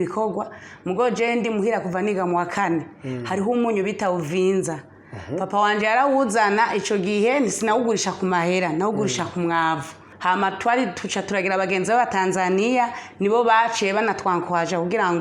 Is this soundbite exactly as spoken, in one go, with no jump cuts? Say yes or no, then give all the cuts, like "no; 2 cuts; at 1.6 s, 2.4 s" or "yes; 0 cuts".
no; 1 cut; at 10.1 s